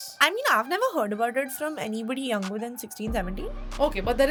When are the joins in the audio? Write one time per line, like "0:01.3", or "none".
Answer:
none